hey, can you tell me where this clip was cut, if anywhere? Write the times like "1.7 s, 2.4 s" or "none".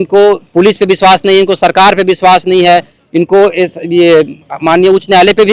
none